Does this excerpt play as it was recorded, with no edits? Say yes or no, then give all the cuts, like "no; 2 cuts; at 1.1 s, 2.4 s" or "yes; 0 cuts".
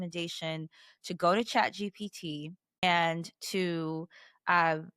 no; 1 cut; at 2.6 s